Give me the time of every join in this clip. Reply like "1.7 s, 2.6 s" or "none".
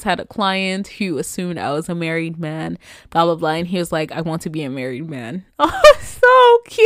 none